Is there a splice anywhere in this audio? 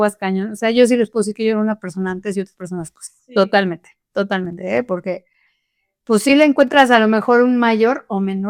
no; 0 cuts

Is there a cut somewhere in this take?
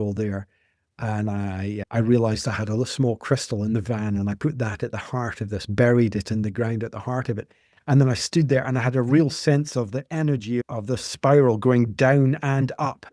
no; 0 cuts

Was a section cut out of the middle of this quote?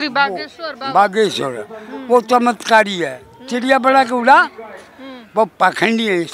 no; 0 cuts

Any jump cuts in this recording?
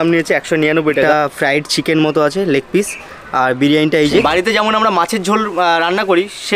yes; 2 cuts; at 1.1 s, 4.2 s

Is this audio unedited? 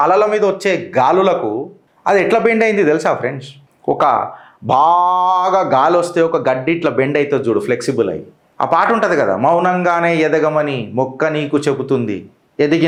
yes; 0 cuts

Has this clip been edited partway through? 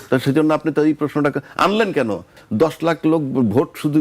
yes; 1 cut; at 2.4 s

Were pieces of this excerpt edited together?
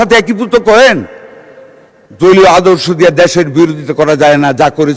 no; 0 cuts

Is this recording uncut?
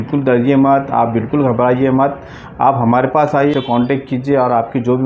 no; 1 cut; at 3.5 s

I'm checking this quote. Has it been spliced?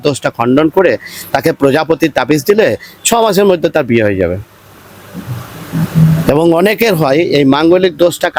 no; 0 cuts

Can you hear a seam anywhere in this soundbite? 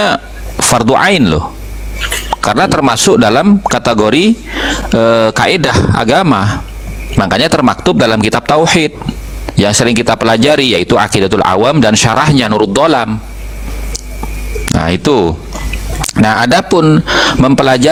no; 0 cuts

